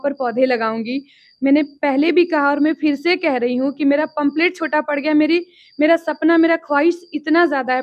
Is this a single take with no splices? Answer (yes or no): yes